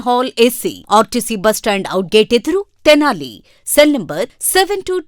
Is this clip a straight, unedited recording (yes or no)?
yes